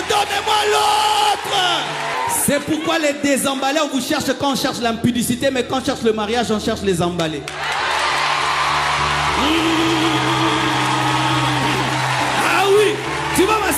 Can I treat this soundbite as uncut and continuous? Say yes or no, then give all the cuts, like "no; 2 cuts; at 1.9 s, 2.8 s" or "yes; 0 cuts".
no; 1 cut; at 2.1 s